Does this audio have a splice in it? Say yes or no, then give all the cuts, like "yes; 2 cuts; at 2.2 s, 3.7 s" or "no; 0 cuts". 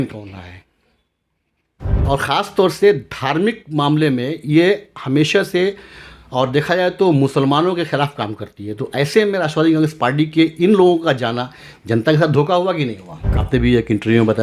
yes; 2 cuts; at 2.0 s, 13.3 s